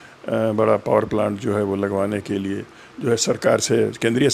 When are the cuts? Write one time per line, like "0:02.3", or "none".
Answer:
none